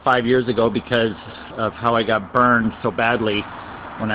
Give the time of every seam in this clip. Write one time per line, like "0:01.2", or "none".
0:02.1